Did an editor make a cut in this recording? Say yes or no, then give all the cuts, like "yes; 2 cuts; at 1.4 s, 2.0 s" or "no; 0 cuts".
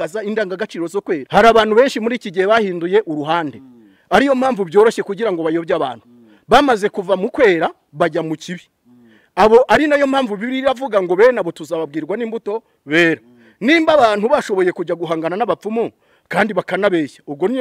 yes; 1 cut; at 1.2 s